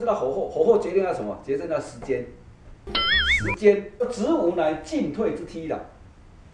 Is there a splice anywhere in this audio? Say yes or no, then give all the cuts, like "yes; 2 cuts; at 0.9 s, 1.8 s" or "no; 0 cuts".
yes; 1 cut; at 4.1 s